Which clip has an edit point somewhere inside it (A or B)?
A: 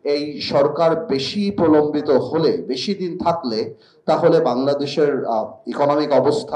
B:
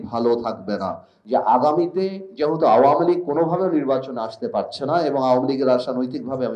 B